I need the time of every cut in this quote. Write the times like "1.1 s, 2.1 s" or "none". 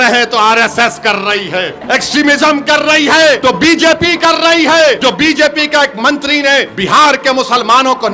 1.8 s, 3.4 s, 5.0 s, 6.7 s